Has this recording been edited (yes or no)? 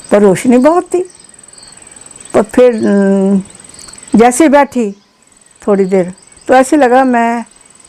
no